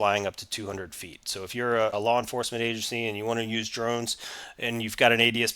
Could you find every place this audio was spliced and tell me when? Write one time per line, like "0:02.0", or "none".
0:01.9